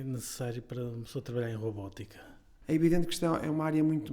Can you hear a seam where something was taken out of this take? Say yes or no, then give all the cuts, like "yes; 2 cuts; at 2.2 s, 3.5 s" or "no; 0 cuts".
yes; 1 cut; at 2.5 s